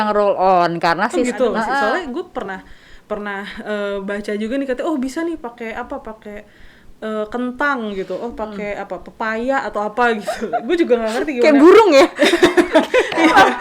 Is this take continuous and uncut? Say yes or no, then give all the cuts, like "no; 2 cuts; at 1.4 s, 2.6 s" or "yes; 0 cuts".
no; 1 cut; at 1.7 s